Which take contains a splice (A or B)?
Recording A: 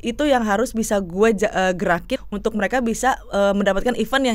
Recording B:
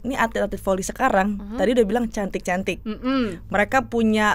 A